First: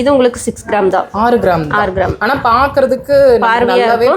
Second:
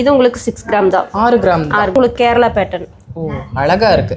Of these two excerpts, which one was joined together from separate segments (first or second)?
second